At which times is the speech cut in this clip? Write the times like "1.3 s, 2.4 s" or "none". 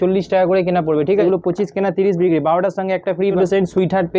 1.2 s, 3.4 s